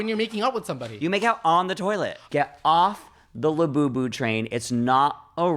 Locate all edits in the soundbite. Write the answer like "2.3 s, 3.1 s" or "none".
2.2 s